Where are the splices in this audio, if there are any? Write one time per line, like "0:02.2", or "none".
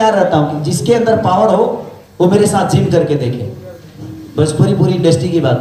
none

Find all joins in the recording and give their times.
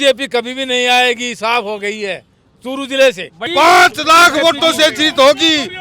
0:03.5

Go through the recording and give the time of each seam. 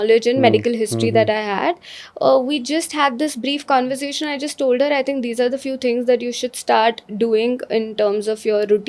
none

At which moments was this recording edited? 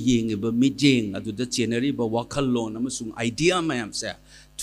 none

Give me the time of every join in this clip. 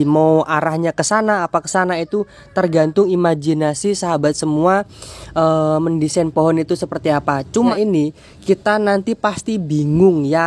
0:07.7

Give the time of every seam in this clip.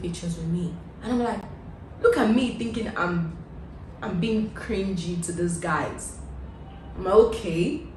none

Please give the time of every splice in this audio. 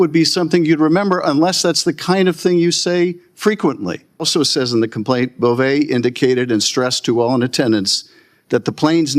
0:04.3

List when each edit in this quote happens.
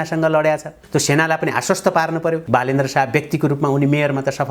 0:02.4

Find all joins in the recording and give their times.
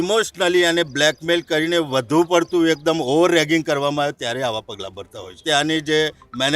0:05.4

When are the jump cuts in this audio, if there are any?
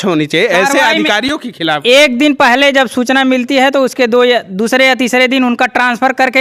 none

